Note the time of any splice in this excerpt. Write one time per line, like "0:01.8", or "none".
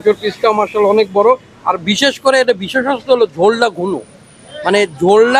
none